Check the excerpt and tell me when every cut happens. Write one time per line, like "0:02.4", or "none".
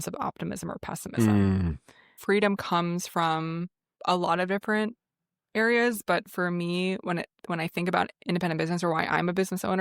0:02.2
0:03.9